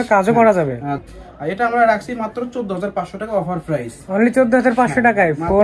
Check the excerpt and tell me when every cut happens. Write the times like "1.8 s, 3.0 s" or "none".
1.0 s